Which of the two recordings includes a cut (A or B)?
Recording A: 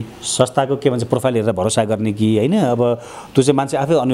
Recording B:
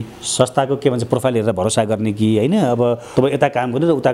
B